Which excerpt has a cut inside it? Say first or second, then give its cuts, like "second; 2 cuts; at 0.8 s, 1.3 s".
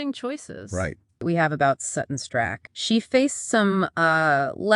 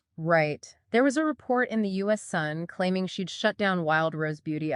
first; 1 cut; at 1.2 s